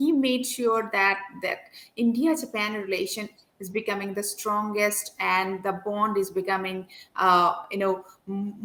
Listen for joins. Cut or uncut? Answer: uncut